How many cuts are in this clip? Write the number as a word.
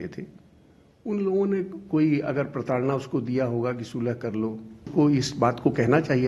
one